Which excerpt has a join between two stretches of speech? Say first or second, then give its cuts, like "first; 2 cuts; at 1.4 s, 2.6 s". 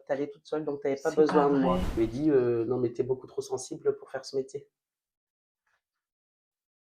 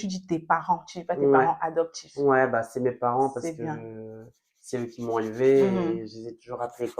first; 1 cut; at 1.9 s